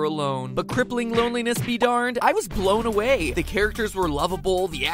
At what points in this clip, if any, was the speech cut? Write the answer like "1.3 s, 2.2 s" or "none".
none

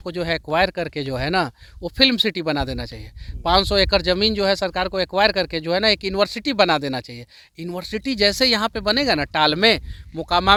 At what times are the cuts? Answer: none

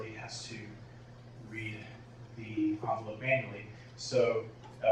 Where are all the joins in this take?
1.1 s

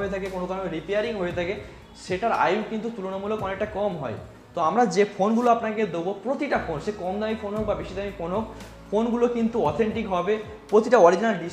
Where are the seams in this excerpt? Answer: none

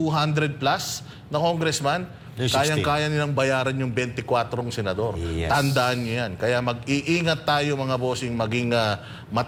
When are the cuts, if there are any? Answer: none

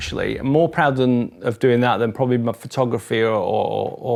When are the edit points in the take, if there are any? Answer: none

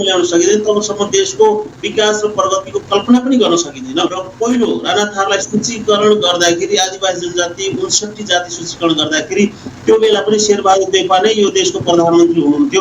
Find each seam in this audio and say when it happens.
4.2 s

